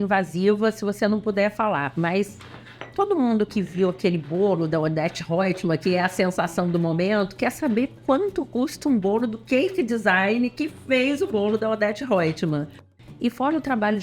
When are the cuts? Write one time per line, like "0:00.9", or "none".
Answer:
0:12.7